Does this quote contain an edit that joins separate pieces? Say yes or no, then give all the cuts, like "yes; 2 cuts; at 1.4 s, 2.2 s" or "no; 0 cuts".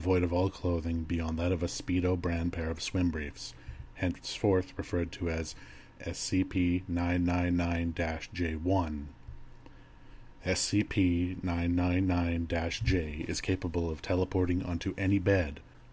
yes; 1 cut; at 7.5 s